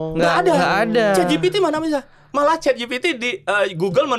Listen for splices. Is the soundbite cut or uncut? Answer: uncut